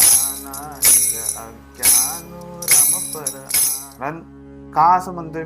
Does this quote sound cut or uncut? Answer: cut